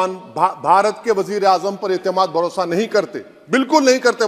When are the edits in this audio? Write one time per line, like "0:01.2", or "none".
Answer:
none